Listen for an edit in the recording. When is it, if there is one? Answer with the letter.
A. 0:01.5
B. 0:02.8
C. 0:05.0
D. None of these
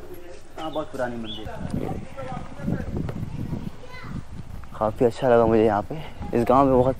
A